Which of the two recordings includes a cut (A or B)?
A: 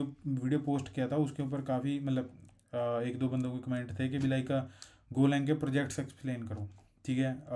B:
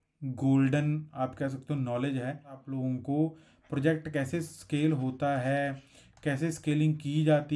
B